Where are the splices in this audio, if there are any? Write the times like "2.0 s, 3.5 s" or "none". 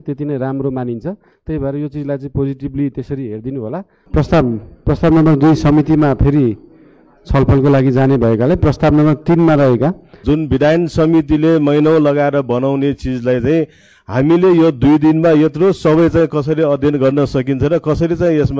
3.9 s, 10.2 s